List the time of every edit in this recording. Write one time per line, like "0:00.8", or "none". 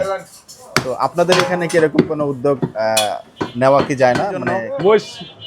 0:04.6